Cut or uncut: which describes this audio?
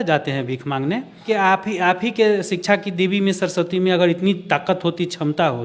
uncut